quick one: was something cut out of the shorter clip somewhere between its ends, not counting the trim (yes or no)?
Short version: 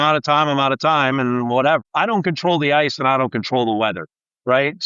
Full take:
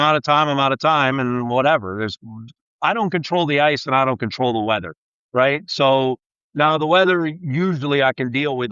yes